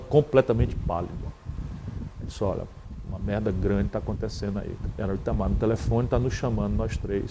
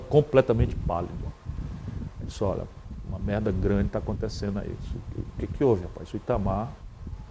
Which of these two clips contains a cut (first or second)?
first